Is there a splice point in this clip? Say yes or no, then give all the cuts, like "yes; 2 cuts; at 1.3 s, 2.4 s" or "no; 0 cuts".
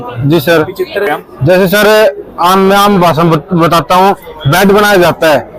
yes; 1 cut; at 1.1 s